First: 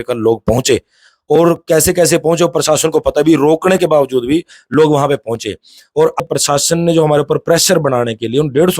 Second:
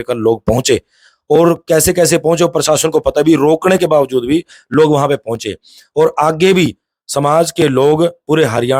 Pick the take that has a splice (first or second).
first